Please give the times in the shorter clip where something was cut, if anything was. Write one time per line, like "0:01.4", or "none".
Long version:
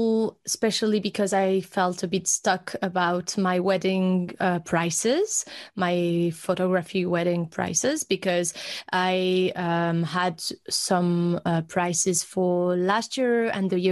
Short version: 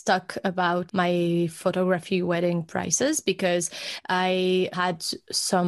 0:00.9
0:04.7

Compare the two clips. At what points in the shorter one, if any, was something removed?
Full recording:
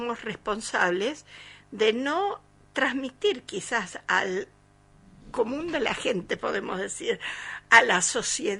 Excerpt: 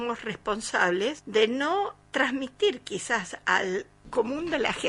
0:01.2
0:02.0
0:04.0

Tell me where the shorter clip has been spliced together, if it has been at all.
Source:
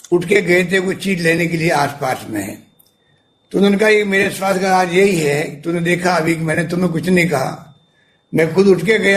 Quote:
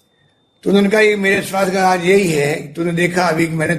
none

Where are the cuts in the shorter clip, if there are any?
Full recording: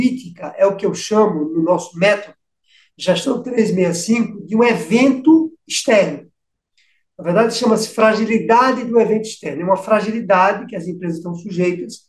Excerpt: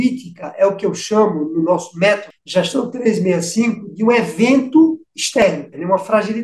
0:02.3
0:05.4

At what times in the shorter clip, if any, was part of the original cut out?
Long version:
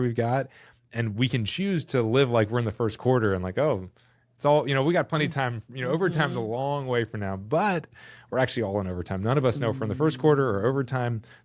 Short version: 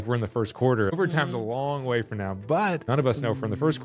0:01.0
0:02.8

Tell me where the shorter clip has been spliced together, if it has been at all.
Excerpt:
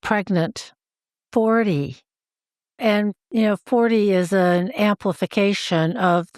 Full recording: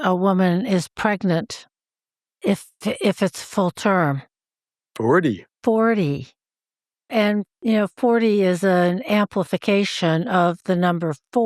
0:01.2

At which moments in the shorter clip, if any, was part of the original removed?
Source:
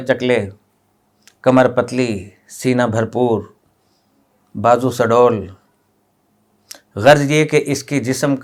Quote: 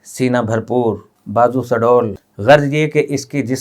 0:01.1
0:02.3

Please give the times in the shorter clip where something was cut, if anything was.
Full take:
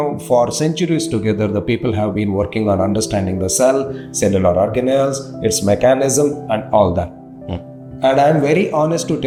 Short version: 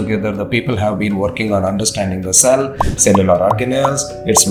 none

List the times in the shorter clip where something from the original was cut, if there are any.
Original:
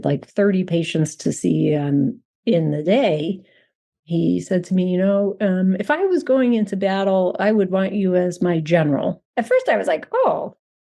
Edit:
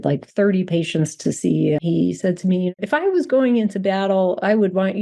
0:01.8
0:02.8

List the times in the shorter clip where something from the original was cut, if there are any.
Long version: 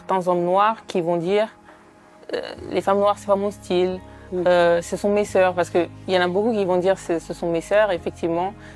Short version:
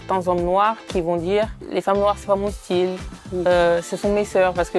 0:01.6

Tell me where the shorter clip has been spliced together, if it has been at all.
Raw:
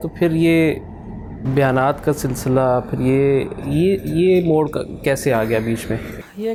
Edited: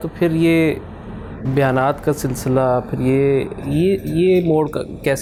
none

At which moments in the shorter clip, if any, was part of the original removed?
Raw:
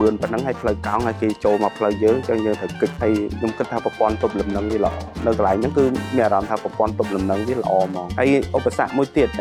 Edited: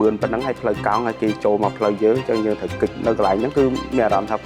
0:02.9

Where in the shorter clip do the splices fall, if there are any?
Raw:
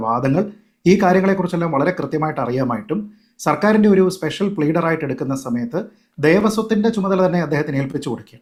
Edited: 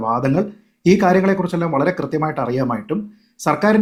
none

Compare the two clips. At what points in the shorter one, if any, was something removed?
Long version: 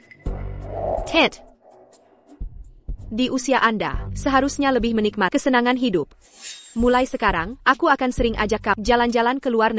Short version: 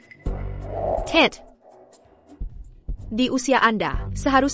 none

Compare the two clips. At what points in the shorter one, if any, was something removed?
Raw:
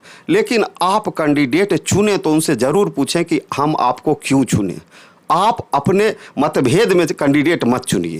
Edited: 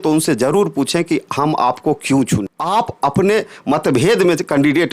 0:02.5

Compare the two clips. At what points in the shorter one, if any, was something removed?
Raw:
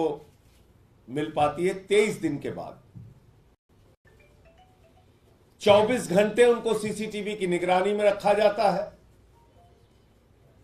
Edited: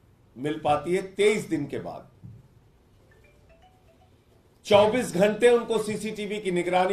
0:03.0

